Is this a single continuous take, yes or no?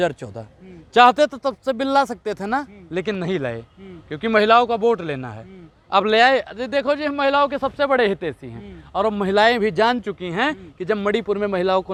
yes